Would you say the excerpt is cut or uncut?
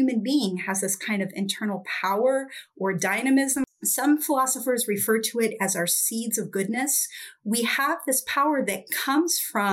cut